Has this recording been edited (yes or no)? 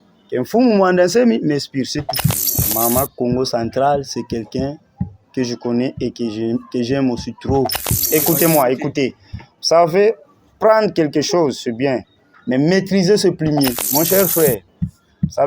yes